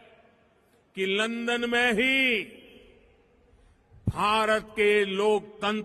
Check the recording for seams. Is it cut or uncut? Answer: uncut